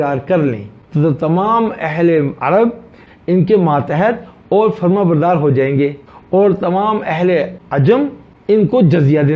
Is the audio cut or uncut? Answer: cut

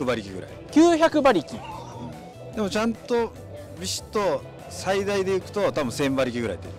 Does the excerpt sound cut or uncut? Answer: uncut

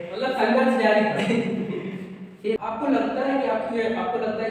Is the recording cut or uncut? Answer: cut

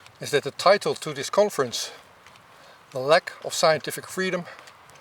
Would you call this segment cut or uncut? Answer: uncut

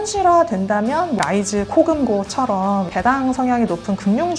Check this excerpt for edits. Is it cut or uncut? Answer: cut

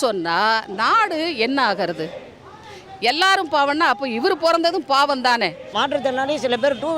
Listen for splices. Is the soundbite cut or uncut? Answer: cut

